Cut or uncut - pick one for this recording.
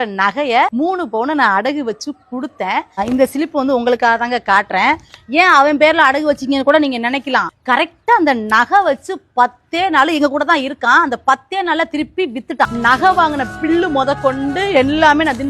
cut